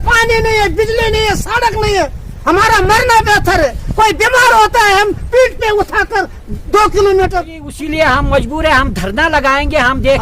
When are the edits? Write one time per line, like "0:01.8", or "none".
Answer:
0:07.7